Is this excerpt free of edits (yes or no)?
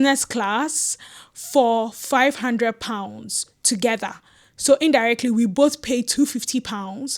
yes